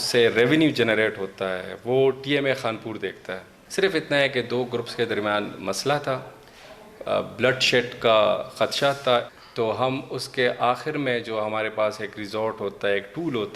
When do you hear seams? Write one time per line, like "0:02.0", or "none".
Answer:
0:03.5
0:09.3